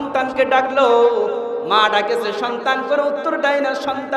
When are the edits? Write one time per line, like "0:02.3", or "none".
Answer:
0:01.6